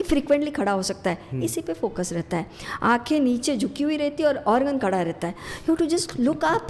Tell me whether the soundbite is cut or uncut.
uncut